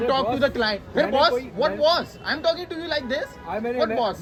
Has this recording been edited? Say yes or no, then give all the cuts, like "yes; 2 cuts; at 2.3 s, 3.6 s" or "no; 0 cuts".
no; 0 cuts